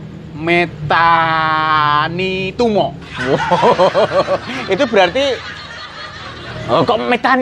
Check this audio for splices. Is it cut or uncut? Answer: uncut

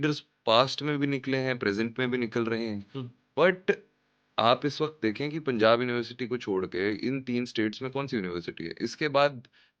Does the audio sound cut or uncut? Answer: uncut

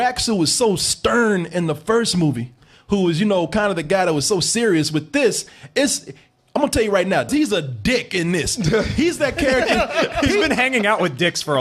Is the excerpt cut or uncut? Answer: cut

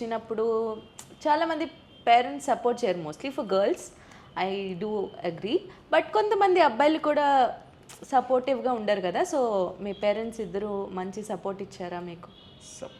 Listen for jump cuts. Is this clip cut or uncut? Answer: uncut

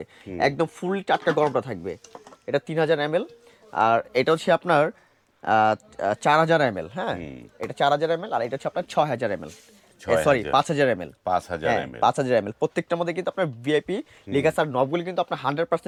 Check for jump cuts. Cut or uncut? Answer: uncut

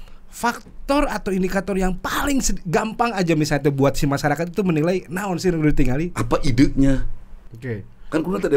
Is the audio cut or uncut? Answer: cut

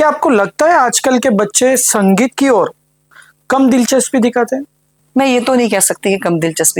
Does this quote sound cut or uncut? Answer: uncut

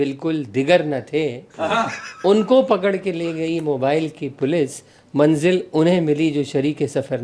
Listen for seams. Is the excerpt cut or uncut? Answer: uncut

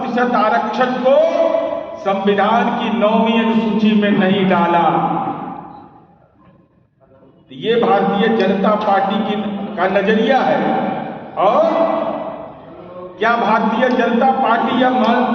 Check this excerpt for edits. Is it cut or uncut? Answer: uncut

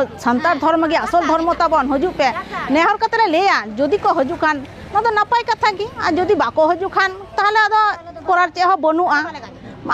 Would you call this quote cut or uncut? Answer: uncut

